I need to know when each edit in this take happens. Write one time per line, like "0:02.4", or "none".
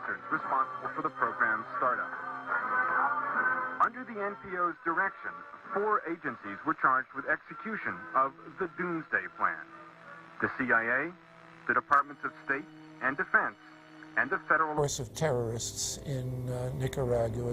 none